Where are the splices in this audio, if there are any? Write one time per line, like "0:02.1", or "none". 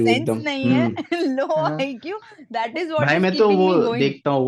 none